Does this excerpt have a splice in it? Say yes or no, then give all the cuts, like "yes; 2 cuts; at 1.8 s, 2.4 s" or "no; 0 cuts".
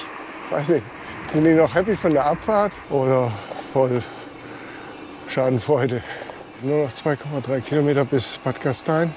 yes; 1 cut; at 6.6 s